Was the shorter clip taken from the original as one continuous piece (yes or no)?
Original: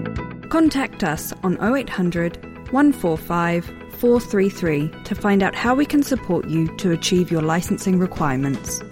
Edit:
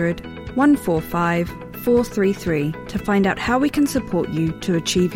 yes